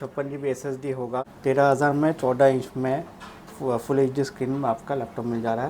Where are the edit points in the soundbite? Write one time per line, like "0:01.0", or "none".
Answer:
0:01.3